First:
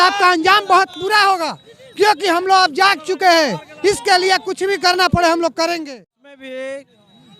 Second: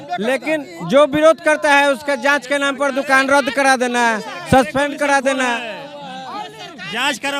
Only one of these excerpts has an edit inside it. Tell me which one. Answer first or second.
first